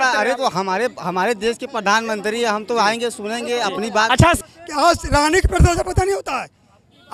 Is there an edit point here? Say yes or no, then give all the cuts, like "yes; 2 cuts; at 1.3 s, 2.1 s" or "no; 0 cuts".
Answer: yes; 1 cut; at 4.4 s